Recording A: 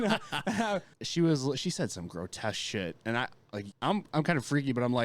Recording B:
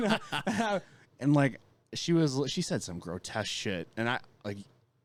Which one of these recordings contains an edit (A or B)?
A